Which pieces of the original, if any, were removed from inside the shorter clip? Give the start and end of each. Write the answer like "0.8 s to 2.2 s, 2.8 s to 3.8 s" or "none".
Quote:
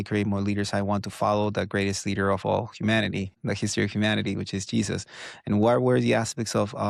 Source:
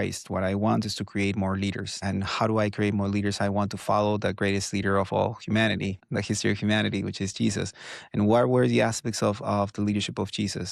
none